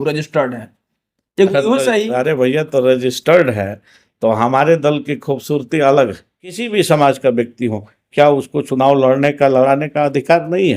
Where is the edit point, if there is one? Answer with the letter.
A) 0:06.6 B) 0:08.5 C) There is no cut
A